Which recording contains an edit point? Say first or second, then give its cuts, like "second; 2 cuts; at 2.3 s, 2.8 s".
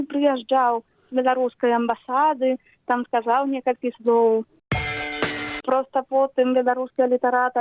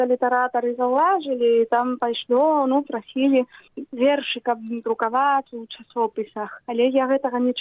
first; 1 cut; at 5.1 s